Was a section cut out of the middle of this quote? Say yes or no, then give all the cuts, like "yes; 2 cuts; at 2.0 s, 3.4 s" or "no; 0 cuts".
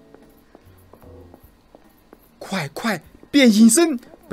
no; 0 cuts